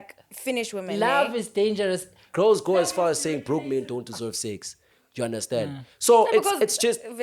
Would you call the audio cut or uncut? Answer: cut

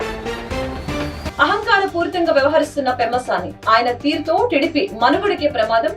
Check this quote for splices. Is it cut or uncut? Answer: cut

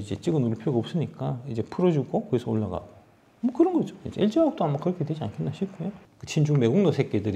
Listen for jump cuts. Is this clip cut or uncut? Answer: cut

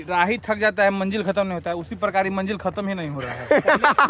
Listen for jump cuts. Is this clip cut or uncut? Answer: uncut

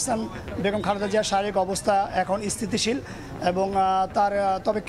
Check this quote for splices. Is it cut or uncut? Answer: uncut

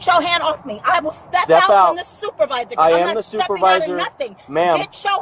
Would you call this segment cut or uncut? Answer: cut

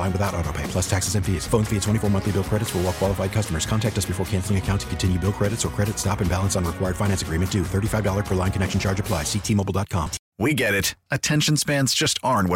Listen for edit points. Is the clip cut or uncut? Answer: cut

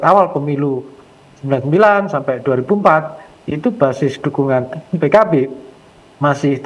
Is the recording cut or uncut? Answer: uncut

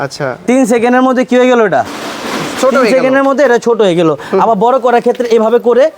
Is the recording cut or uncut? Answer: uncut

